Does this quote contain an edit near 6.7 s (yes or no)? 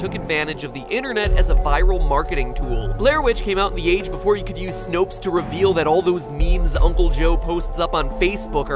no